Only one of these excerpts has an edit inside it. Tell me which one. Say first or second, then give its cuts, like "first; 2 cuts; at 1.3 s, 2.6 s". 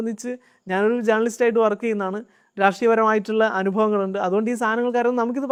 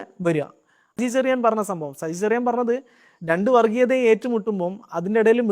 second; 1 cut; at 1.0 s